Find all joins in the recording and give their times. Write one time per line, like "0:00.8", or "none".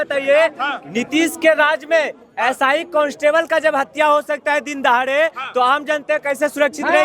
none